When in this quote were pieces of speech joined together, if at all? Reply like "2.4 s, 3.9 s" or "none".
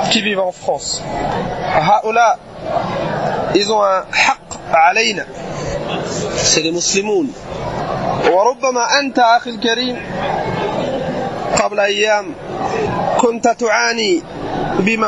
1.3 s, 7.8 s, 12.9 s